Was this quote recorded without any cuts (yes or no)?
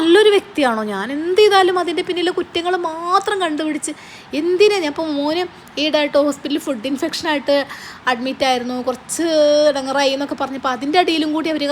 yes